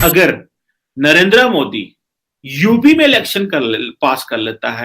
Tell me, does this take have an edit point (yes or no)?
no